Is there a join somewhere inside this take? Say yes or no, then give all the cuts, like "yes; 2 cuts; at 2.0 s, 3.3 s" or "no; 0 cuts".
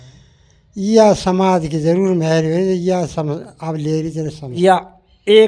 yes; 1 cut; at 4.6 s